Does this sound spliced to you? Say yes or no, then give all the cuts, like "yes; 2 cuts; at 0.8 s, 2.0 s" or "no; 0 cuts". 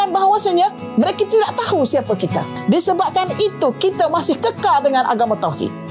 yes; 1 cut; at 2.6 s